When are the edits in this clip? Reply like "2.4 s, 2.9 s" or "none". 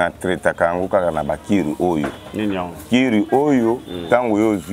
none